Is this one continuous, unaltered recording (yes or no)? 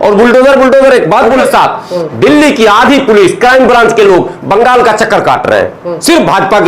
no